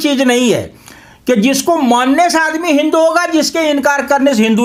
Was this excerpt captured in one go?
yes; 0 cuts

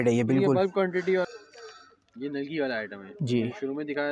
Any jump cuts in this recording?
yes; 1 cut; at 1.3 s

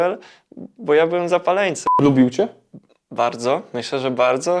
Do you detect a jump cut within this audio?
yes; 1 cut; at 1.8 s

